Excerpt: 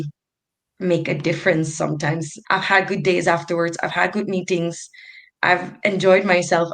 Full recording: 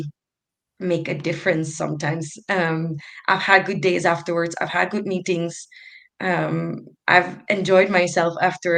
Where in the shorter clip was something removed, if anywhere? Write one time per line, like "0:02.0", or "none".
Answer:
0:02.3
0:05.2